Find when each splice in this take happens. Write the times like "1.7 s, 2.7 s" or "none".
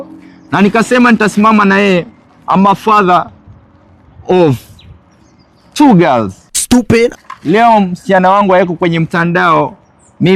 none

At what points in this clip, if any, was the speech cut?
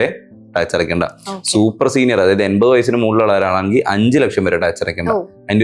none

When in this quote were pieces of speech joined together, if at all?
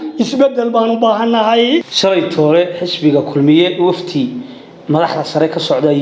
1.9 s

